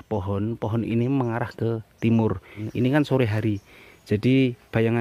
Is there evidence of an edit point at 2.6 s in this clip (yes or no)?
yes